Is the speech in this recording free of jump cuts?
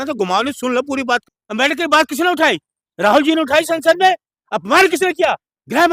no; 1 cut; at 1.2 s

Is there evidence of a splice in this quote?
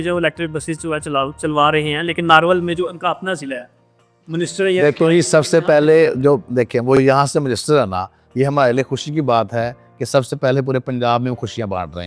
no; 0 cuts

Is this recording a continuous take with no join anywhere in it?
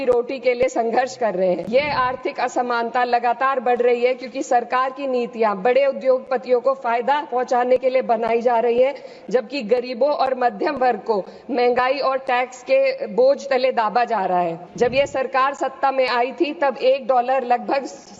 no; 2 cuts; at 1.6 s, 14.6 s

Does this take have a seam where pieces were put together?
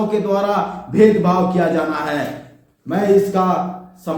no; 0 cuts

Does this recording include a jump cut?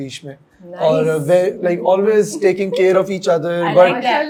no; 0 cuts

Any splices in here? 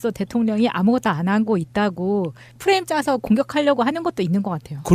yes; 1 cut; at 3.8 s

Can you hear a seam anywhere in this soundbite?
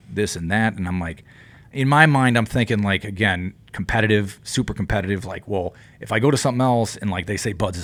no; 0 cuts

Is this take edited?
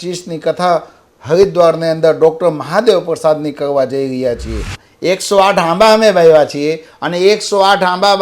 yes; 1 cut; at 4.8 s

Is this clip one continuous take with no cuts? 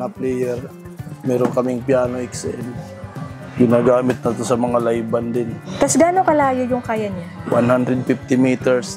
no; 2 cuts; at 3.5 s, 7.3 s

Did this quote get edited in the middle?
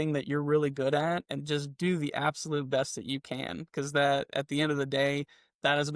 no; 0 cuts

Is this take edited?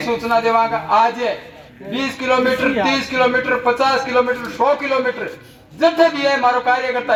no; 0 cuts

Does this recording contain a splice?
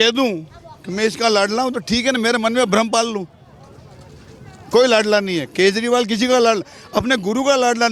no; 0 cuts

